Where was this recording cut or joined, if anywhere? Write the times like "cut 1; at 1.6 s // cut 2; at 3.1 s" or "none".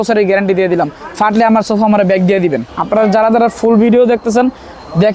cut 1; at 2.7 s